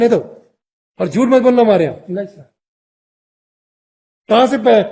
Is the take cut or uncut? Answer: uncut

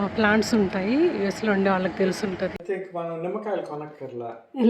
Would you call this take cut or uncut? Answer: cut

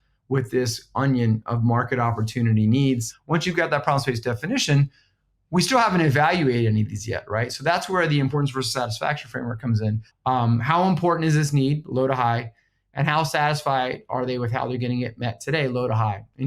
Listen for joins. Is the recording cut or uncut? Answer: cut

